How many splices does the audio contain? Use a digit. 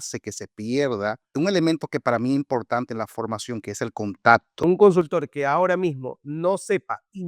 2